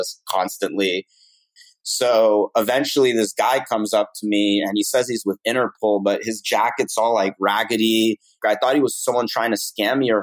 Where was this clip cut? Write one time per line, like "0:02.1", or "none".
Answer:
0:01.5
0:08.4